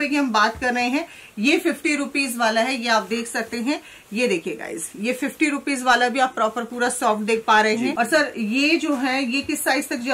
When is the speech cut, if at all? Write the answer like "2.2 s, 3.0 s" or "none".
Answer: 7.9 s